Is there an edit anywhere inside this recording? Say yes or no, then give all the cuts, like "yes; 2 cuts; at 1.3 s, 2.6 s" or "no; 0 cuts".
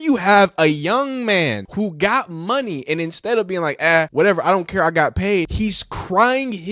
yes; 3 cuts; at 1.6 s, 4.1 s, 5.5 s